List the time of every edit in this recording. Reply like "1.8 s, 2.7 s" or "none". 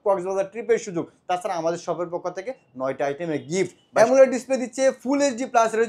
3.9 s